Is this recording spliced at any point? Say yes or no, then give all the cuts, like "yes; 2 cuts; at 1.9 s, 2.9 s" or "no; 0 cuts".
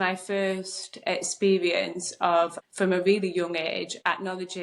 yes; 1 cut; at 2.6 s